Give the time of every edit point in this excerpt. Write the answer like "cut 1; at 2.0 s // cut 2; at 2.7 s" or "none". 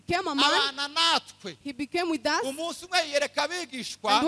none